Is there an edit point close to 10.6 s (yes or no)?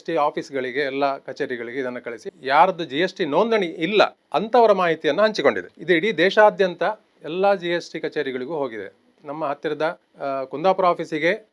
no